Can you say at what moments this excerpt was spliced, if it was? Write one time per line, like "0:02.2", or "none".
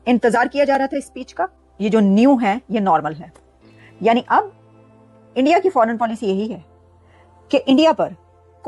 0:01.6